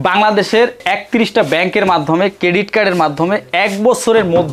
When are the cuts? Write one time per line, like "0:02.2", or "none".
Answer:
none